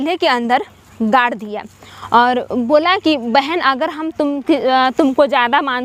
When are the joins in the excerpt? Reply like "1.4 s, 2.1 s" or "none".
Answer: none